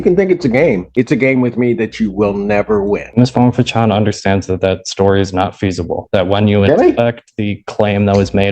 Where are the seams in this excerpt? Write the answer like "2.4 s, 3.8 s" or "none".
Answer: 3.1 s

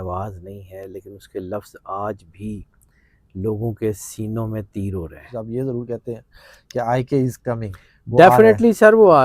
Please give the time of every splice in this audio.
5.2 s

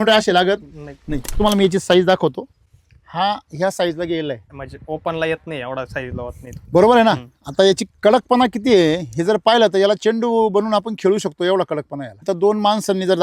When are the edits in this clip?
1.4 s, 4.6 s, 12.2 s

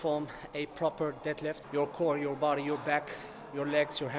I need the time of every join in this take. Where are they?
1.6 s

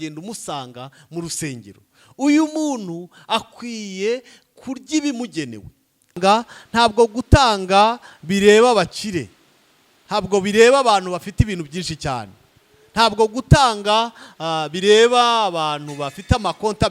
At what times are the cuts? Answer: 6.2 s

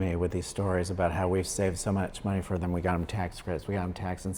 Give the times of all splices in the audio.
none

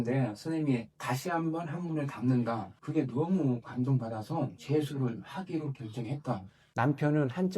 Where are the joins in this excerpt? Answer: 6.6 s

